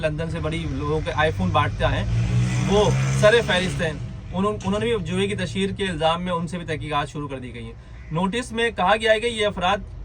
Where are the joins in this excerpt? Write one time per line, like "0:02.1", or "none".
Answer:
none